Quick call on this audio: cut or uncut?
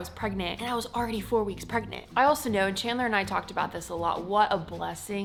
uncut